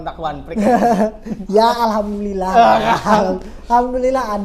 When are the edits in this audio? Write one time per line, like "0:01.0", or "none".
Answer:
none